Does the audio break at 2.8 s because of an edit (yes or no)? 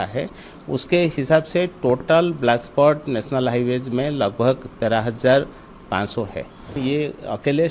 no